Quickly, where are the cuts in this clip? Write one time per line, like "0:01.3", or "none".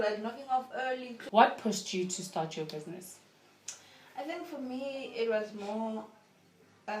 0:01.1